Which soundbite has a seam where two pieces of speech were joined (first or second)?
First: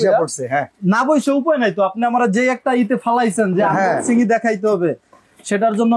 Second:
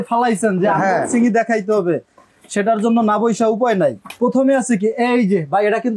second